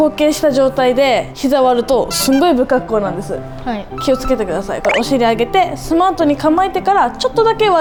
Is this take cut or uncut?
uncut